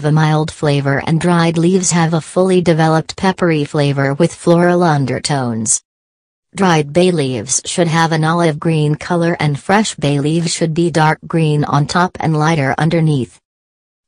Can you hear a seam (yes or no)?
yes